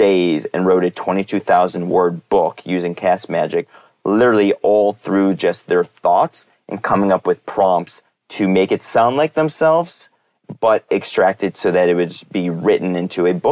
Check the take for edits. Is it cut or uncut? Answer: uncut